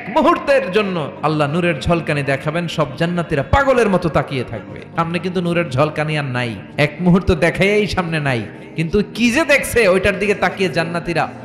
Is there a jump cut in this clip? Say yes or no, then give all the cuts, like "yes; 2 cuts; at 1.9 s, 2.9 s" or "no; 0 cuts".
yes; 3 cuts; at 1.1 s, 4.9 s, 6.6 s